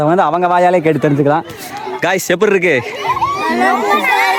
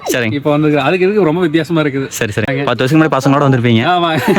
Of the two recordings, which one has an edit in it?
second; 1 cut; at 2.5 s

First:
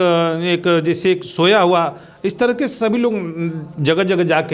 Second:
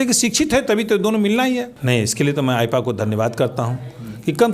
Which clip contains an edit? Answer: second; 1 cut; at 1.7 s

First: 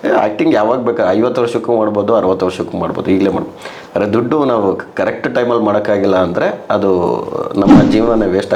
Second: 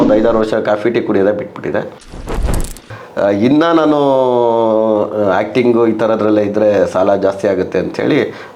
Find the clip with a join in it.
second; 1 cut; at 2.4 s

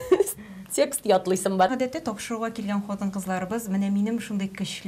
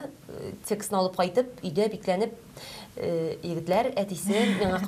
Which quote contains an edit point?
first; 1 cut; at 1.7 s

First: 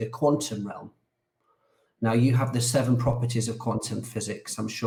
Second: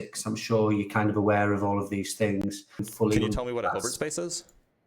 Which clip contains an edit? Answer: second; 1 cut; at 2.9 s

